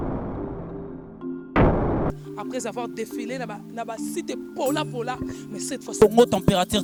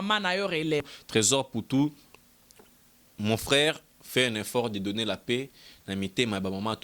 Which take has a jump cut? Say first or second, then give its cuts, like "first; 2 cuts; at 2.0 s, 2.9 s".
second; 1 cut; at 1.0 s